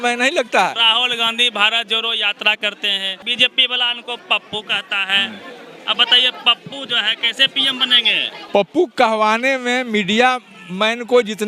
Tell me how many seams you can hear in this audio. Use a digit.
3